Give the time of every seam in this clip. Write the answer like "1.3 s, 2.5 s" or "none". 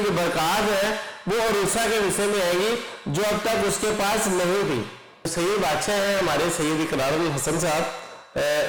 none